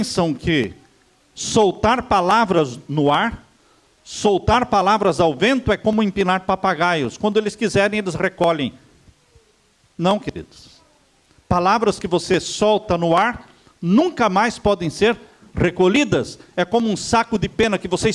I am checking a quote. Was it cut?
no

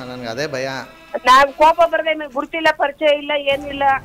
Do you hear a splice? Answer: no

